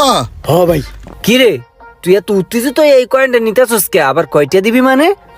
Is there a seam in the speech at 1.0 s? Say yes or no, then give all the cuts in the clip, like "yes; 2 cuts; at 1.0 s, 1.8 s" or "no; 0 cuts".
yes; 1 cut; at 1.0 s